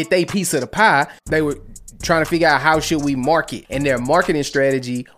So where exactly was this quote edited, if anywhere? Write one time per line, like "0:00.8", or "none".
0:01.2
0:03.6